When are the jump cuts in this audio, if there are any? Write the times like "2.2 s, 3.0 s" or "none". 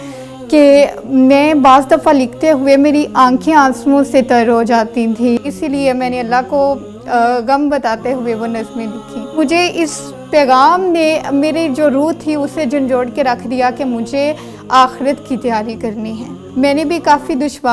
5.4 s, 9.4 s, 16.3 s